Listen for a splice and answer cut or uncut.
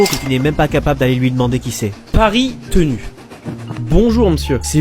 uncut